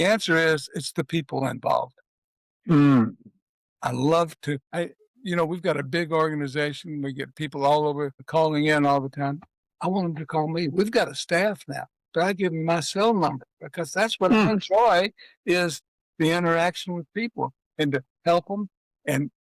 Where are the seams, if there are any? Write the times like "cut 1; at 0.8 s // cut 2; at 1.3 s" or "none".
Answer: cut 1; at 4.6 s // cut 2; at 8.2 s